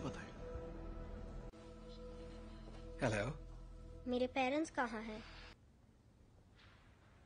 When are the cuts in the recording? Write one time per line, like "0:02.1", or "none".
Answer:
0:05.6